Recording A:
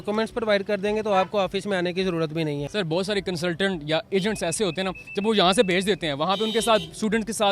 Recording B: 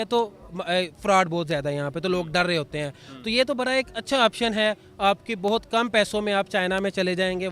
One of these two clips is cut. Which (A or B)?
A